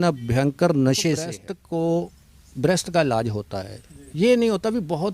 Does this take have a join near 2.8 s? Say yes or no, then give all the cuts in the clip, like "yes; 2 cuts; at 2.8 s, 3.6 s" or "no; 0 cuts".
no; 1 cut; at 1.5 s